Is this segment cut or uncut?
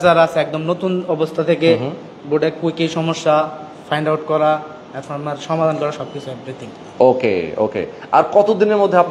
uncut